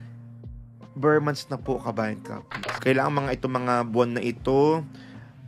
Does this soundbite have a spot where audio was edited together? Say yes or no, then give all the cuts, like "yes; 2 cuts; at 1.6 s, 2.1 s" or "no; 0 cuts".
yes; 1 cut; at 2.8 s